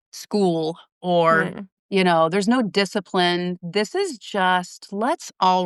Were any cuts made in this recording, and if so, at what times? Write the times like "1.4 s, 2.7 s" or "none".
none